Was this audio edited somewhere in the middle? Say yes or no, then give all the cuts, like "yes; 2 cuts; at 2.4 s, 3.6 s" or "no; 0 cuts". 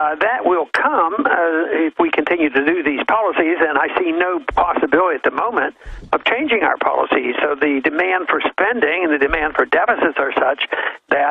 yes; 1 cut; at 9.1 s